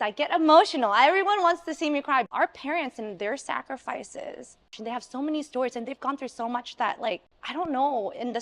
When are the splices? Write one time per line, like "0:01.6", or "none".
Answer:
0:02.2
0:04.7
0:07.4